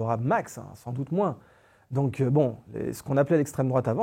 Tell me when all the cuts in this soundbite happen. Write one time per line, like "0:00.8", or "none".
none